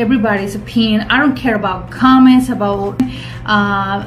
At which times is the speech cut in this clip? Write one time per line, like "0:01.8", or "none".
0:03.0